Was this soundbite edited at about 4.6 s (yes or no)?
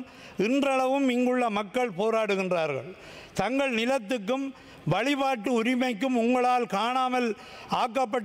no